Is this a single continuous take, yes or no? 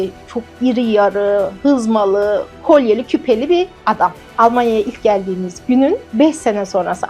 no